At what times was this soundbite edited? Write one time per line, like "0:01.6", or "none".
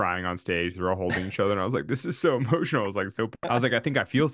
0:03.4

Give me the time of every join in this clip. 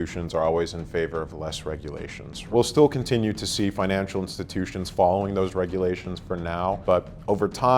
0:02.4
0:06.8

